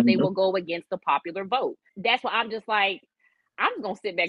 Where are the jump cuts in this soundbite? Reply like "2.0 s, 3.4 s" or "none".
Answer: 1.9 s